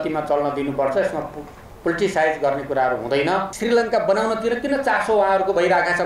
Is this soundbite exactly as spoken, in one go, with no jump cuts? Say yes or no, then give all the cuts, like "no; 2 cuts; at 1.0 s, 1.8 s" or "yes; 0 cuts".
no; 1 cut; at 3.5 s